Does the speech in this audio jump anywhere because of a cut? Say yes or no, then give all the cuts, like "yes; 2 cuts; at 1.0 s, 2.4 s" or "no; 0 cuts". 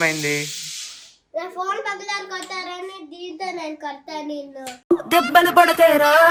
no; 0 cuts